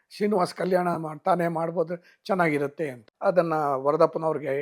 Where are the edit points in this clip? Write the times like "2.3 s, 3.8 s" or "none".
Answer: 3.1 s